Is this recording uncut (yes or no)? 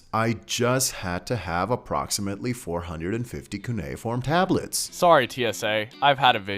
yes